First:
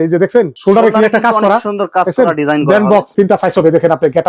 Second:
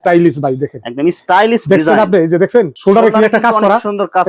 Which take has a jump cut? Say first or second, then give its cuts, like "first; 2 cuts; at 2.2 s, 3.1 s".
first; 1 cut; at 3.1 s